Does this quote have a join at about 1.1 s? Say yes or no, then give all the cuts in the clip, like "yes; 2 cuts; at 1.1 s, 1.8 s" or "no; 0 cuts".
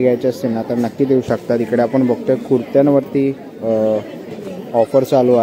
no; 0 cuts